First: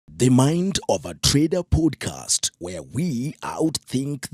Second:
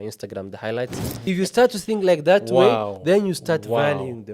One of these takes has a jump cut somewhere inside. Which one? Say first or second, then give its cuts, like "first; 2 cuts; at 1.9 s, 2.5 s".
second; 1 cut; at 1.2 s